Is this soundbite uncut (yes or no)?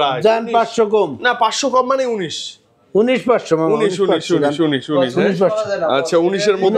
yes